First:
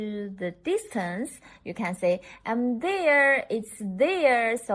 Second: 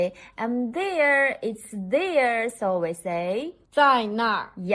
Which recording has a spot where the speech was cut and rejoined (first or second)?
second